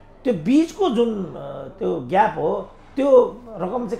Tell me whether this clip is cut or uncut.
uncut